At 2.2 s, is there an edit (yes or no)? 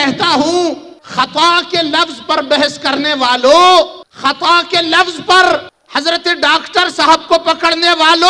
no